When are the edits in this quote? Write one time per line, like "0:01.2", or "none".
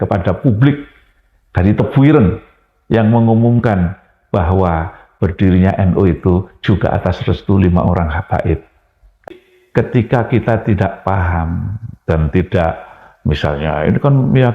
0:09.3